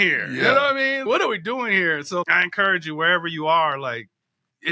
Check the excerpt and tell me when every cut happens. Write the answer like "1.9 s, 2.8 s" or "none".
1.0 s, 2.3 s

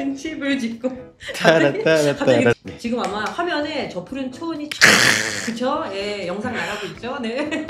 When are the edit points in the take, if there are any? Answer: 2.5 s

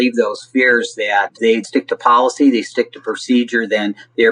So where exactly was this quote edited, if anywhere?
1.6 s

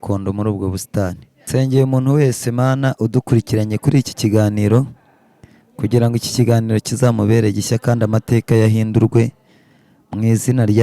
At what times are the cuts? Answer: 1.3 s

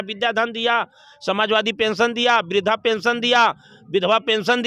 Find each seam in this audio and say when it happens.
none

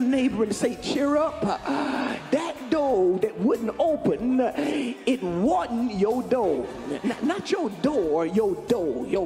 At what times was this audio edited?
2.2 s, 6.9 s

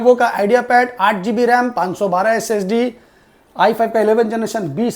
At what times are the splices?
none

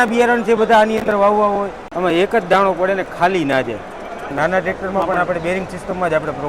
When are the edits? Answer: 1.9 s, 4.3 s

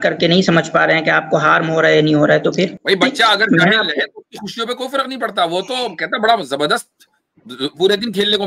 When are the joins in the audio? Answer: 2.8 s

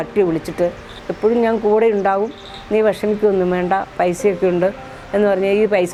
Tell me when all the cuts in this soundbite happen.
none

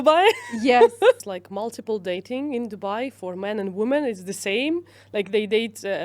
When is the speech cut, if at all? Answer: 1.2 s

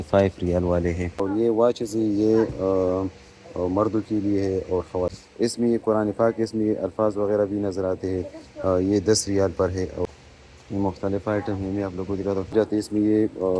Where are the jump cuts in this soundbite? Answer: 1.1 s, 5.1 s, 10.1 s, 12.5 s

